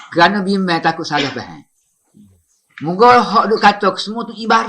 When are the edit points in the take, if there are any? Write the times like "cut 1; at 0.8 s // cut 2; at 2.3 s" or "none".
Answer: none